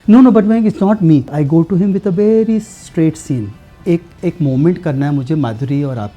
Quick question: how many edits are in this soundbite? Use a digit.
2